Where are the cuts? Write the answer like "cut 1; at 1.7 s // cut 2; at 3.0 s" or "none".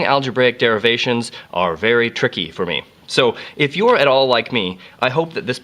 cut 1; at 2.1 s